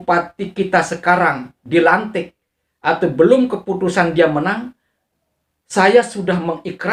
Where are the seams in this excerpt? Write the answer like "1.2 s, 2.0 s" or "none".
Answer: none